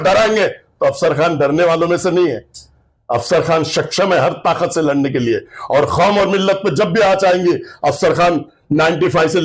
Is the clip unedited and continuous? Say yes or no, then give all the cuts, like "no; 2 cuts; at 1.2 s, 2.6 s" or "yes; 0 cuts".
yes; 0 cuts